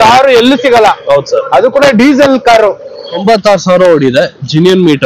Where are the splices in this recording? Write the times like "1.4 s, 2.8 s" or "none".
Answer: 3.1 s